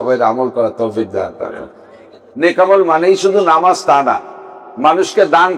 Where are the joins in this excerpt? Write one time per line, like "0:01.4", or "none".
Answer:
0:02.3

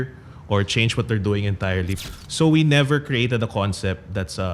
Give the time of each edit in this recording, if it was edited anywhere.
0:02.0

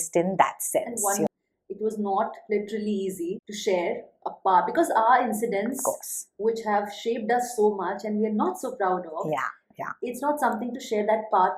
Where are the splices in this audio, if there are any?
0:01.3

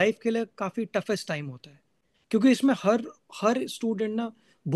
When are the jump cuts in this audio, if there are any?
none

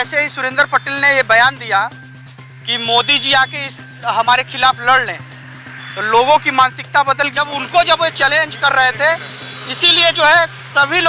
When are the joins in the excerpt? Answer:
0:07.4

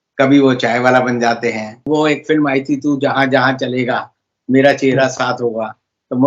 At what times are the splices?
0:01.7

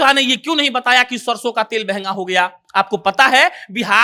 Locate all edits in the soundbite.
none

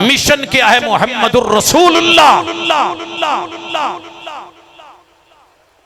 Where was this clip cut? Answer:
none

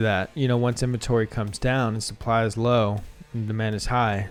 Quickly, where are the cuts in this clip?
none

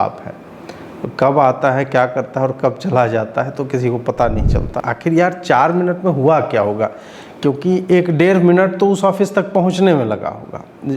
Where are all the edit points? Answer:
0:04.8

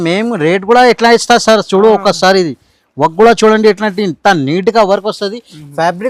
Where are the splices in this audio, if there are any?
none

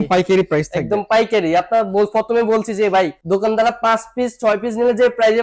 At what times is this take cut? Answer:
0:03.2

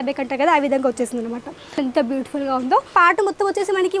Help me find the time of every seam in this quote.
0:01.8
0:02.9

